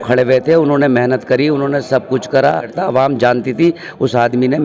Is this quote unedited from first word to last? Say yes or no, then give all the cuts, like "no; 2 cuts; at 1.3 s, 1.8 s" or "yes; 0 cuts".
no; 1 cut; at 2.7 s